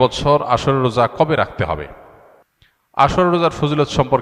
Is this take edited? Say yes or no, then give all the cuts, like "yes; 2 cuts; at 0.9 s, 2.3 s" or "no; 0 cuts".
no; 0 cuts